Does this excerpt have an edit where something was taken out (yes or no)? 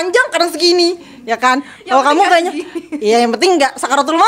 no